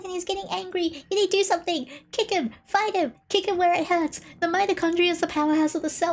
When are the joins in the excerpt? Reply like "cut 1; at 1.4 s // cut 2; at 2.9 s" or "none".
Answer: none